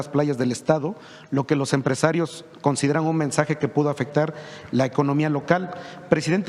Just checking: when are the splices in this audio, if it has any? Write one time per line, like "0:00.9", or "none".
none